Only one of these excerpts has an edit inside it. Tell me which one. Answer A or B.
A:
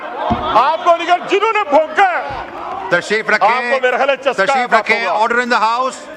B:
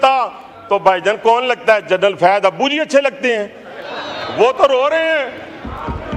A